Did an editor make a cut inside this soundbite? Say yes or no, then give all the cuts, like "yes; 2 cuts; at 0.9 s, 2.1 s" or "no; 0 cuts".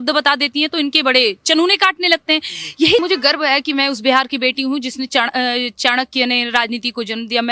yes; 1 cut; at 3.0 s